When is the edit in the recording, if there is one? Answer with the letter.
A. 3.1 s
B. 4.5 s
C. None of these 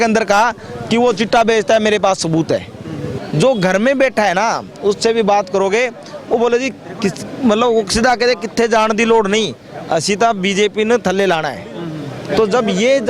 A